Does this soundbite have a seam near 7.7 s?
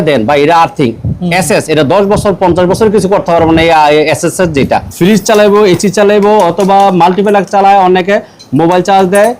no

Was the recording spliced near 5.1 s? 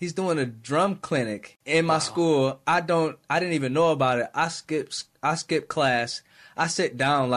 no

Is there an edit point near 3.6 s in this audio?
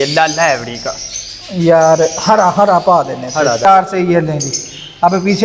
yes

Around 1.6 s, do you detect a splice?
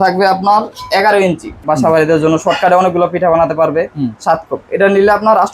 yes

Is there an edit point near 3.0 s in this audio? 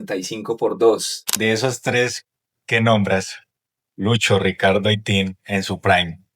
no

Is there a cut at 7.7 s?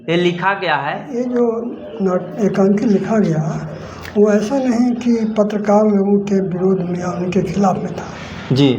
no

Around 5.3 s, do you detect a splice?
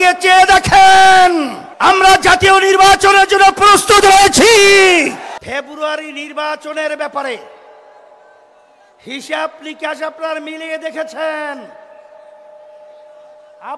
yes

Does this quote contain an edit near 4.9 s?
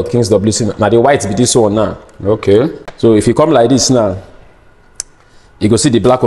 no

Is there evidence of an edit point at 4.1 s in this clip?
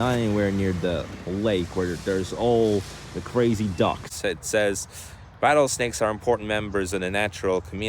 yes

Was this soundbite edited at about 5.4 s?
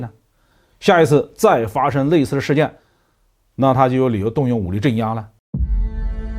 yes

